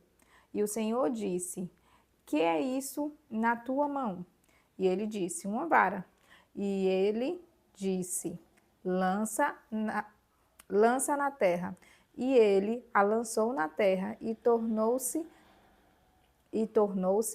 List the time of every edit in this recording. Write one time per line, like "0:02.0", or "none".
none